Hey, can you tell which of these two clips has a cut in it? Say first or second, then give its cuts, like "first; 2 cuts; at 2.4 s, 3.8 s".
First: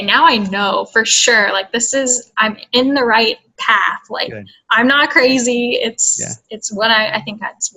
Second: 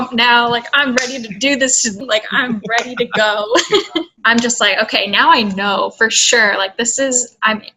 second; 2 cuts; at 2.0 s, 4.1 s